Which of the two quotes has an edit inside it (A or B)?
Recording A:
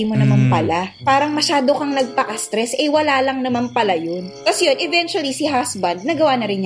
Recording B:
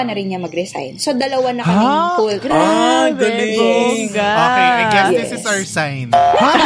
A